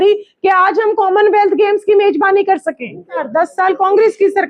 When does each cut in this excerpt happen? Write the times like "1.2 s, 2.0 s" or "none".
3.2 s